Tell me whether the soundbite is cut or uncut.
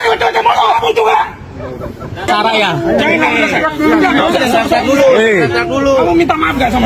cut